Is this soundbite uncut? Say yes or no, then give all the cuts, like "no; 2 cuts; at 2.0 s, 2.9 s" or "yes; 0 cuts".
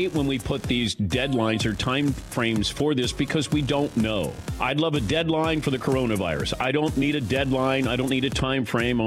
yes; 0 cuts